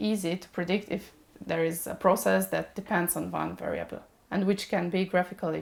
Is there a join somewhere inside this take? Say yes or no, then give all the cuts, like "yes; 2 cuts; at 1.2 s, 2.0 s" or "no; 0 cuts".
no; 0 cuts